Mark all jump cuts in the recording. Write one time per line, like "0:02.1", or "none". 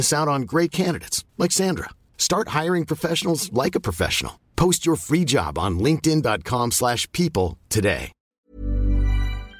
0:08.2